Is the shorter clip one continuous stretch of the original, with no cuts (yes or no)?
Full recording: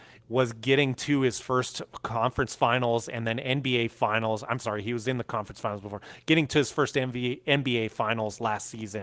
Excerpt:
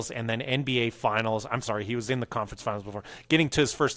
yes